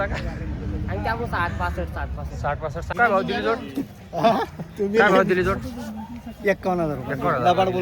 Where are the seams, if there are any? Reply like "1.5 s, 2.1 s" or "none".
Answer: 2.9 s